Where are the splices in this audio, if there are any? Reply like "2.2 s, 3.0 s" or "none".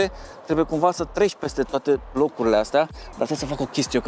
none